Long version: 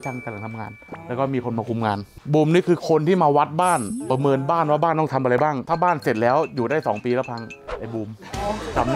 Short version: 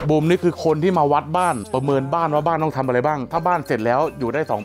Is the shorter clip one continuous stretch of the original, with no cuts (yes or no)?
no